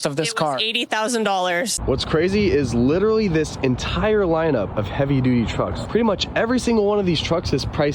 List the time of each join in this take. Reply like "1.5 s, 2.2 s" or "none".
1.7 s, 4.7 s, 5.8 s